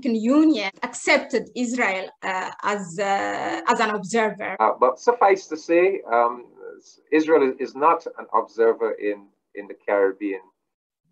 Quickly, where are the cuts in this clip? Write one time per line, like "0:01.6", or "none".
0:04.4